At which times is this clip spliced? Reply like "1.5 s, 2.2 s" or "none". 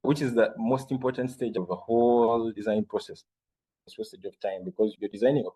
3.8 s